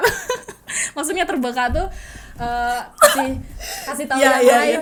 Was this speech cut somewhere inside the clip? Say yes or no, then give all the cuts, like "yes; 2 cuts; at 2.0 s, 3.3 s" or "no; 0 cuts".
no; 0 cuts